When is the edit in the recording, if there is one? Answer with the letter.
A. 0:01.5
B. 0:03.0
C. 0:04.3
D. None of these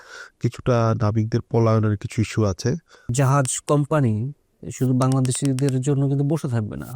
B